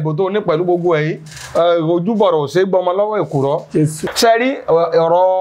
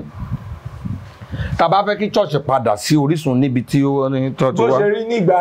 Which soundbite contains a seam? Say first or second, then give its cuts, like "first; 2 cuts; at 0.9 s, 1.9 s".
first; 1 cut; at 4.0 s